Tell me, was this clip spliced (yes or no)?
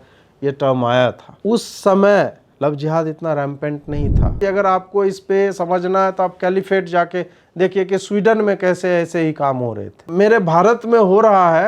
yes